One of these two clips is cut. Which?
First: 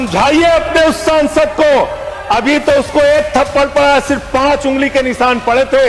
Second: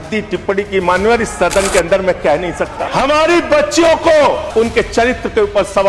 second; 2 cuts; at 2.8 s, 4.4 s

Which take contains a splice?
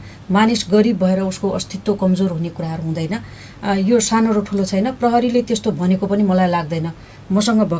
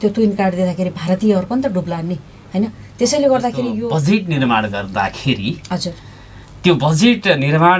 second; 1 cut; at 3.8 s

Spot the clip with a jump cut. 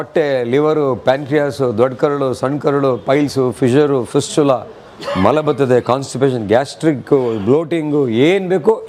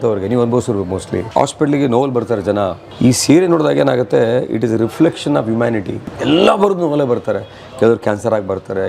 second; 3 cuts; at 1.2 s, 2.8 s, 6.1 s

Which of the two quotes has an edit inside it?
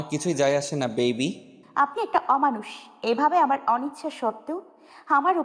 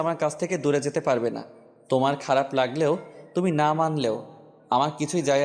first; 1 cut; at 1.6 s

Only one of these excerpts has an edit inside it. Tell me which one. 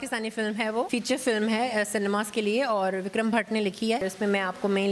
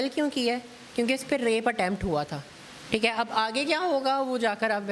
first; 2 cuts; at 0.9 s, 4.0 s

